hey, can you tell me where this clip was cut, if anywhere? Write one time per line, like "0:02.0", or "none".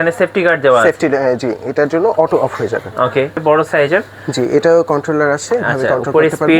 0:03.4